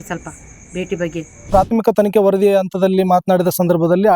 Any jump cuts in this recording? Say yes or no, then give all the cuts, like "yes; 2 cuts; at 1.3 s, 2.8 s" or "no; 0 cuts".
yes; 1 cut; at 1.5 s